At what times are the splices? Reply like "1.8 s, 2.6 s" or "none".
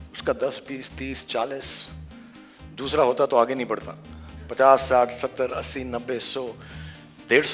none